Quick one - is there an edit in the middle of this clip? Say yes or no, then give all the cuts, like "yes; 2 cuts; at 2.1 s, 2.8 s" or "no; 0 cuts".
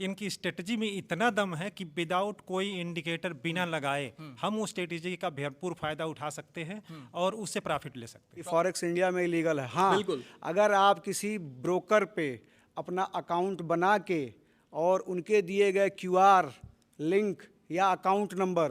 yes; 1 cut; at 8.3 s